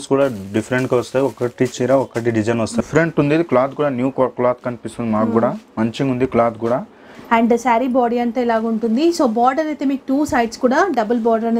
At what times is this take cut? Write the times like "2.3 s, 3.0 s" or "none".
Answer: 2.8 s, 7.1 s

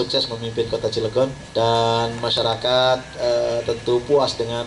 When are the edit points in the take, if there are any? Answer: 1.4 s

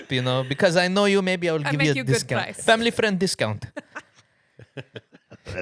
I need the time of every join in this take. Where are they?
none

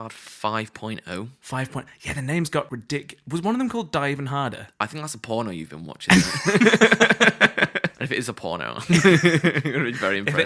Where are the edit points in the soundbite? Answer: 2.8 s, 8.0 s

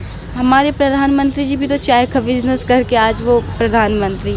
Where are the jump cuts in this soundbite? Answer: none

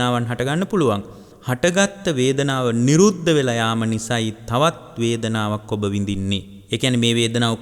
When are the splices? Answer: 6.5 s

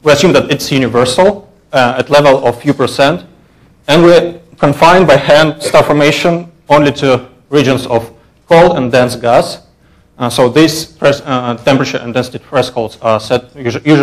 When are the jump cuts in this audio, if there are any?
6.5 s

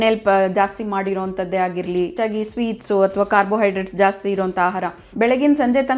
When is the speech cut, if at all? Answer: 2.1 s, 5.0 s

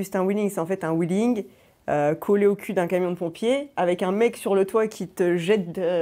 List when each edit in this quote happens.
none

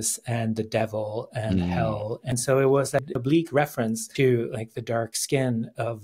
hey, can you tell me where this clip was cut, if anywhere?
2.3 s, 3.1 s, 4.1 s

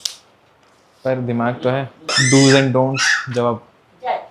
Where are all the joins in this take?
2.1 s

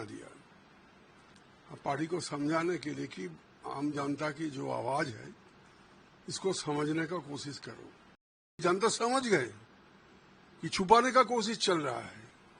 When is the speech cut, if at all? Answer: 8.6 s

